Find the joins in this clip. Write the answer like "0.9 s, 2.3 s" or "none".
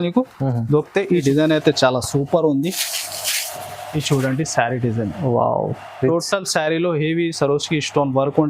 1.2 s